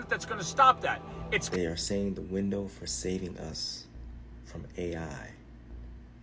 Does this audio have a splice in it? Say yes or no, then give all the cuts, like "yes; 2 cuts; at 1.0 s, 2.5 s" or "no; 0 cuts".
yes; 1 cut; at 1.5 s